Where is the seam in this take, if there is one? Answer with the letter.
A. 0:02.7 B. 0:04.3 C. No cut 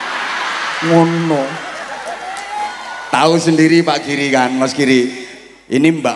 A